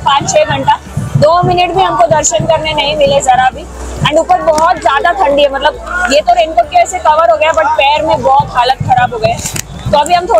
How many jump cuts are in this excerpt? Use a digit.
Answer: 0